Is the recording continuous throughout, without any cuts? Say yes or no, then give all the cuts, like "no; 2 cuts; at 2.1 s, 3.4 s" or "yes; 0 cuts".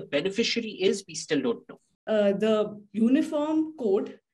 no; 1 cut; at 2.0 s